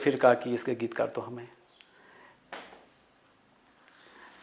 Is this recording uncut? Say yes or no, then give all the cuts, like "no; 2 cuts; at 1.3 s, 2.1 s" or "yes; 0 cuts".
yes; 0 cuts